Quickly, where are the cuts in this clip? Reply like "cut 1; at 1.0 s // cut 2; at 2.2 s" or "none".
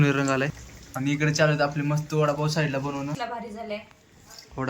cut 1; at 3.1 s